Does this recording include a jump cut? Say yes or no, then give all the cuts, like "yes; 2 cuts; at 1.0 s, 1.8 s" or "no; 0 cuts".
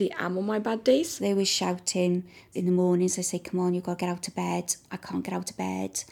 yes; 2 cuts; at 1.1 s, 2.5 s